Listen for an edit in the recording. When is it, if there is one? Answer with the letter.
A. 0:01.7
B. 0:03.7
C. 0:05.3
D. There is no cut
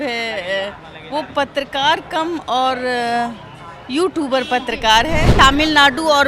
C